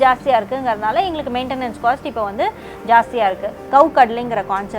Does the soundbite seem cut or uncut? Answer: cut